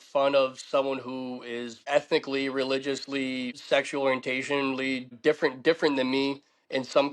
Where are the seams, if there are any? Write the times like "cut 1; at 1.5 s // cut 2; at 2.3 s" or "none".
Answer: cut 1; at 1.8 s // cut 2; at 3.5 s // cut 3; at 5.1 s